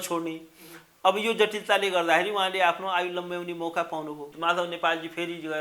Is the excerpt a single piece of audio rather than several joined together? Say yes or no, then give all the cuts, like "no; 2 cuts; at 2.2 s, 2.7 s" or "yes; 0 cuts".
no; 1 cut; at 4.3 s